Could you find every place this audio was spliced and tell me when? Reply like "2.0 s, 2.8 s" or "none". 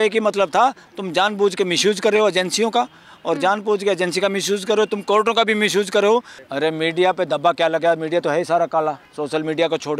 6.4 s, 9.1 s